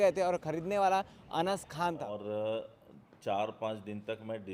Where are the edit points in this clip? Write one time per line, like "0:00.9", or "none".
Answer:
0:02.2